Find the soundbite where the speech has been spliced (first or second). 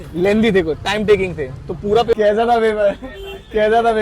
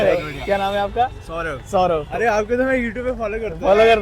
first